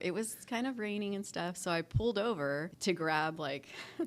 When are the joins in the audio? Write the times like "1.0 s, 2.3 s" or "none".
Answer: 2.7 s